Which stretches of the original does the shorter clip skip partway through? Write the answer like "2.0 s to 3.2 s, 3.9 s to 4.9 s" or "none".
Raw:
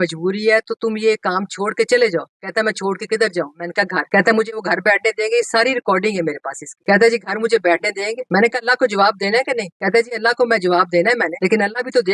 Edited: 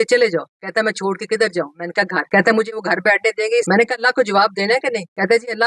5.5 s to 8.3 s